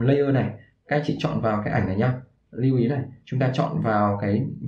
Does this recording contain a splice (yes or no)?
no